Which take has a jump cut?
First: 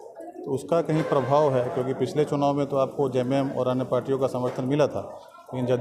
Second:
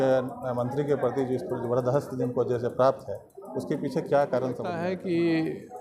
second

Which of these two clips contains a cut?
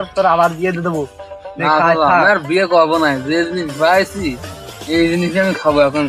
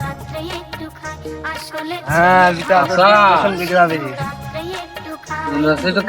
second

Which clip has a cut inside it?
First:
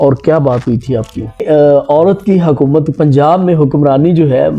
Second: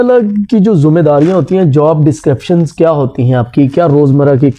first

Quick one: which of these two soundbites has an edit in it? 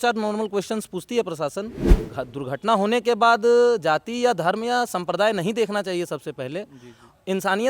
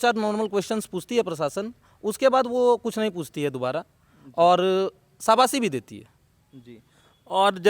first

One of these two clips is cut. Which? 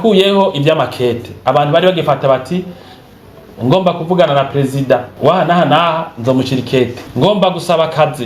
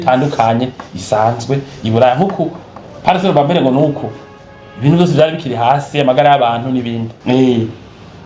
first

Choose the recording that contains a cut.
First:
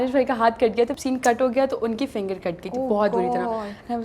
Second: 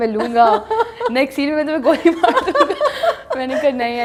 first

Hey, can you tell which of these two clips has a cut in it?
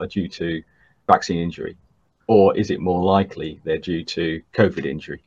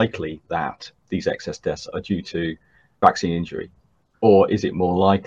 second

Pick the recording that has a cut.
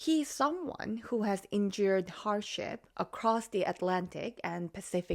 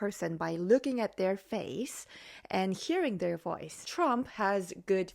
second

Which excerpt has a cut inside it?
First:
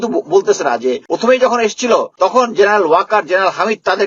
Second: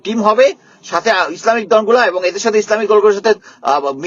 first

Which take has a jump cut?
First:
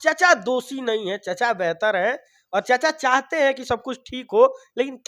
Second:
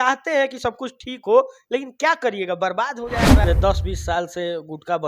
second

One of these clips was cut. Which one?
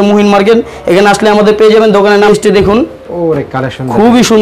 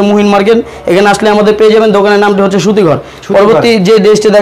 first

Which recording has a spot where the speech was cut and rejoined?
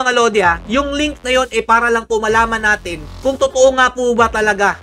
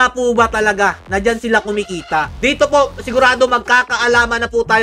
second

